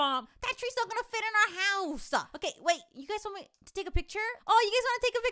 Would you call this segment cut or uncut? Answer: cut